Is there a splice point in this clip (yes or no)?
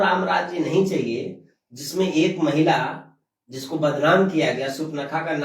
no